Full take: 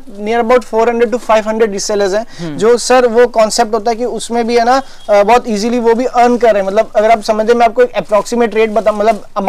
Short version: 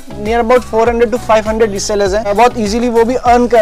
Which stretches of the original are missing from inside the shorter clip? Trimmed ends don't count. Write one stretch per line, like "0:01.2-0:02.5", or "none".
0:02.3-0:05.2